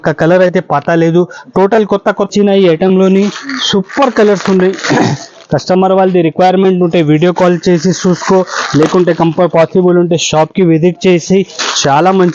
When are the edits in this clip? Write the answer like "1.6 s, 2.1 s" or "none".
2.3 s